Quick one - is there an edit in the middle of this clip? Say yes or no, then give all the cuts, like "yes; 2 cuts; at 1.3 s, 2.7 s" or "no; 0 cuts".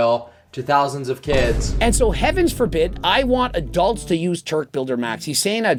no; 0 cuts